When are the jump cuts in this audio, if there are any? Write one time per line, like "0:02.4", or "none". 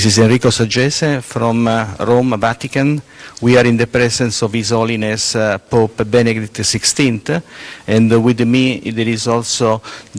none